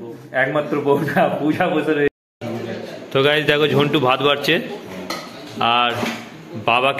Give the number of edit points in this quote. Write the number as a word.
one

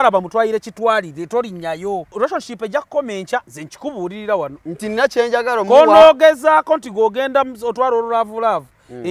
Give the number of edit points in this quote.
three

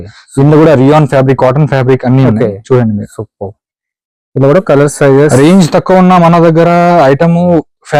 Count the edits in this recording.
zero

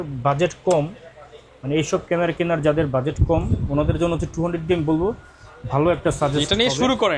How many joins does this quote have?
zero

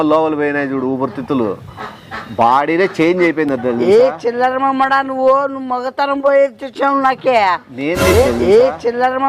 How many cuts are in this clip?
two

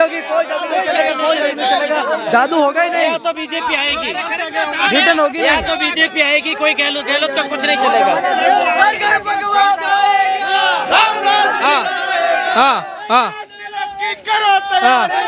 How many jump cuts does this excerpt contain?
zero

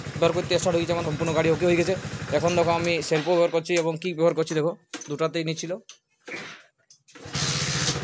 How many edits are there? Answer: two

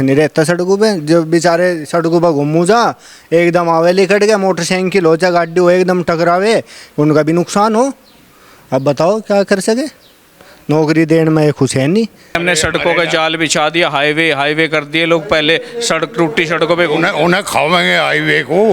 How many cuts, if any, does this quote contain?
one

